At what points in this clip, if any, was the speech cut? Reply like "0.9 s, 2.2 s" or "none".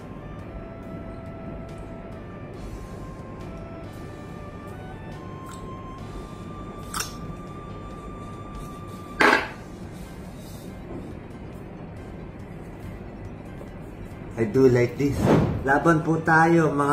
15.5 s